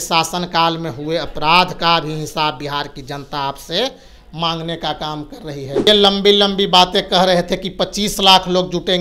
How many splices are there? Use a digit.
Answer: 1